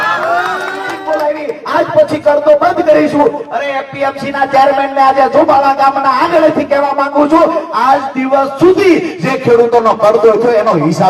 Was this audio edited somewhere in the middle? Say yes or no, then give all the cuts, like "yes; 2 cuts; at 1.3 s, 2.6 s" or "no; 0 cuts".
yes; 1 cut; at 0.9 s